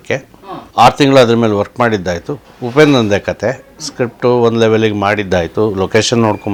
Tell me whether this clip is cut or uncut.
uncut